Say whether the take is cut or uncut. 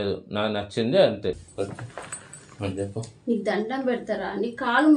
cut